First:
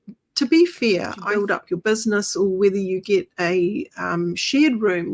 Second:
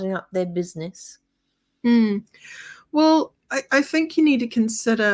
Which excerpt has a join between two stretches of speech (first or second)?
first